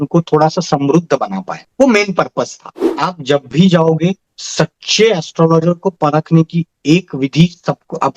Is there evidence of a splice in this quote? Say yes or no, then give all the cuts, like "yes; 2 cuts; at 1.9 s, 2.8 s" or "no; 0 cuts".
yes; 1 cut; at 2.8 s